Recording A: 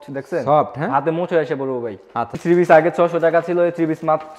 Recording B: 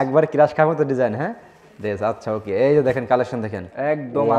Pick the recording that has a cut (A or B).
A